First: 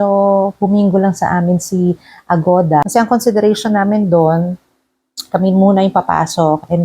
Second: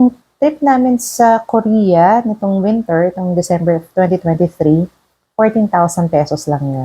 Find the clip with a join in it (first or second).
first